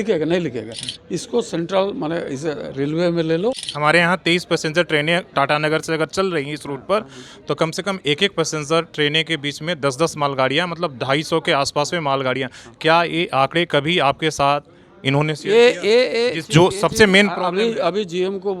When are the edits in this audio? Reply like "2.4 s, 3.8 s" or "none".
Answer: 3.7 s